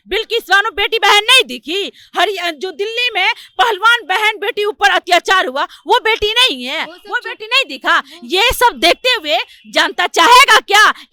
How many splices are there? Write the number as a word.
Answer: zero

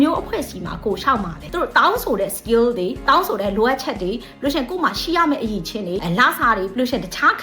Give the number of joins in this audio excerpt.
one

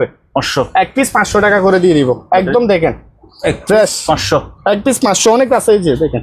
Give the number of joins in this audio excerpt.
zero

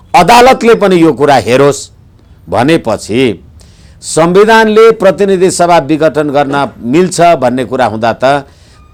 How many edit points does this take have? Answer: zero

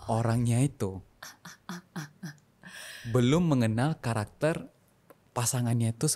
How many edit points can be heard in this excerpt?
zero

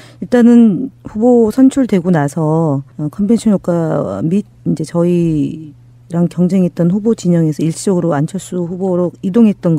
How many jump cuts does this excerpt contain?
one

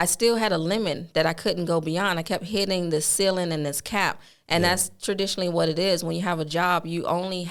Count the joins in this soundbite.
zero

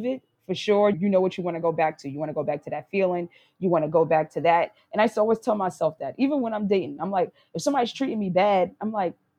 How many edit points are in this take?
one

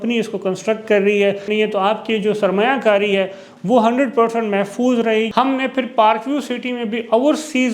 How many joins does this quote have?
two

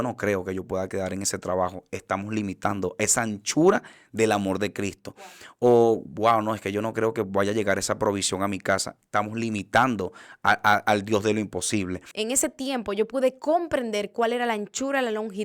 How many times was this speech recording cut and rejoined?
one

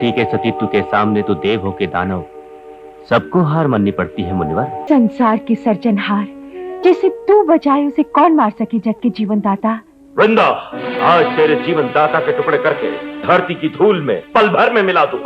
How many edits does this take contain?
one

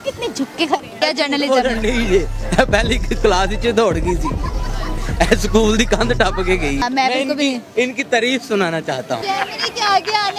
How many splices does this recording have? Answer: three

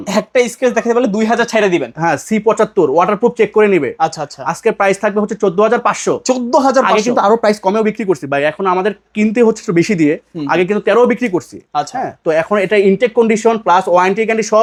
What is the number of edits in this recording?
zero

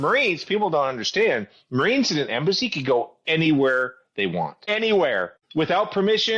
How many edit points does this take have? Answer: two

